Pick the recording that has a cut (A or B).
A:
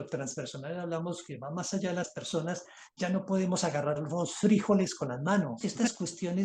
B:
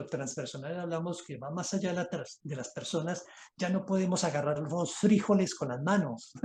A